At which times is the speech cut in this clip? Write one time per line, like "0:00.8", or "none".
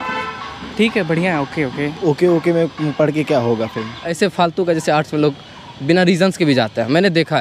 0:01.9
0:04.0